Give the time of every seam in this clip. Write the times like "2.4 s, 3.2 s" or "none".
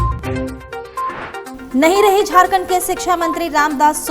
1.5 s

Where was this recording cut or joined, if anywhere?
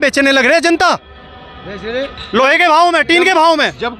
none

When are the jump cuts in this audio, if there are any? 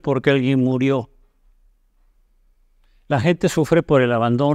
none

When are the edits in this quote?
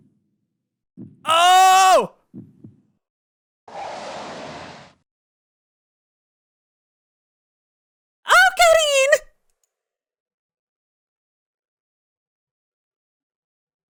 none

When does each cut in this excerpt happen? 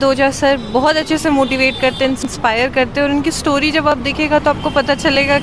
none

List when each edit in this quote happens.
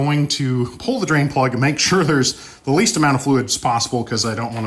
none

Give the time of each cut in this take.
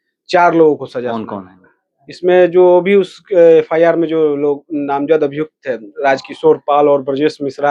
none

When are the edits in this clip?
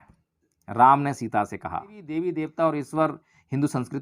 2.0 s

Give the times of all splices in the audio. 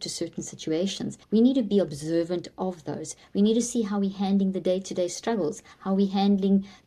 1.2 s

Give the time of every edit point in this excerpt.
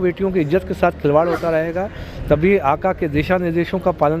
none

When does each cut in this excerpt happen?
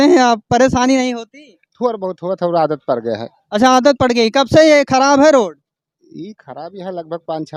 none

